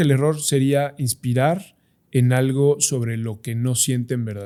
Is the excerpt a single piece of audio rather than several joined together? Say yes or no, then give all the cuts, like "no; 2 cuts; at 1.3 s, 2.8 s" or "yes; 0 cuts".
yes; 0 cuts